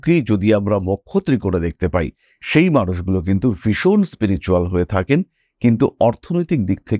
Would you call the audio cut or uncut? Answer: uncut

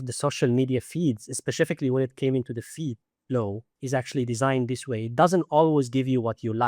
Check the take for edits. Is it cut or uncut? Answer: cut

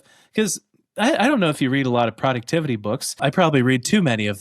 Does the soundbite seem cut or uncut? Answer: cut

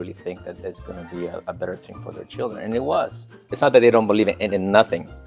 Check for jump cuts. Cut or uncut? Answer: cut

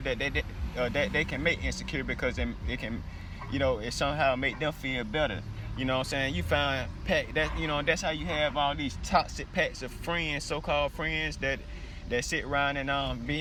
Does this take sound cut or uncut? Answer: uncut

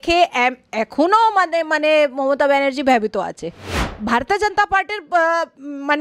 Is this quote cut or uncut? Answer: cut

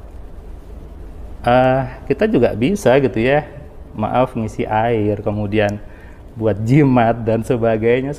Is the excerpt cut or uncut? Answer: uncut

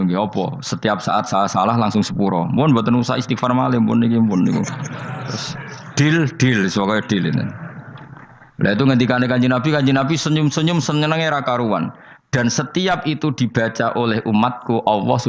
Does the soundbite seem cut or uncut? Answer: uncut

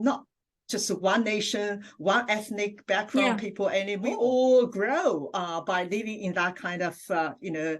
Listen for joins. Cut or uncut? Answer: cut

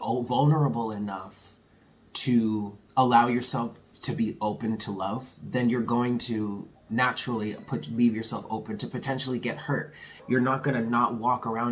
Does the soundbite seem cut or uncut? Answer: cut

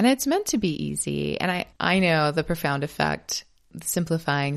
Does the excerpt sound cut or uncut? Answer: cut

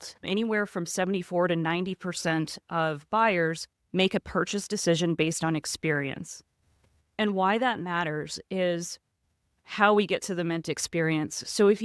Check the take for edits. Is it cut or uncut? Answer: uncut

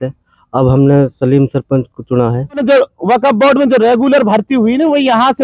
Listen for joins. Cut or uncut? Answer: cut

